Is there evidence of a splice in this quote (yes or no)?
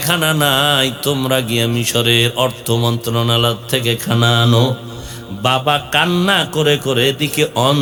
no